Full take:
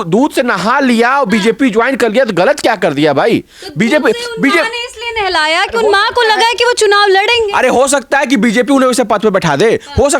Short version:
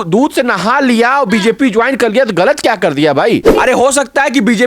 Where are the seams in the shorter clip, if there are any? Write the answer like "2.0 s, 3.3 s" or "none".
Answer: 3.5 s